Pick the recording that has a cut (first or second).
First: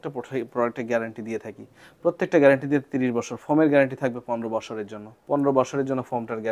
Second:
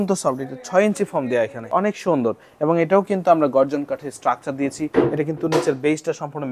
second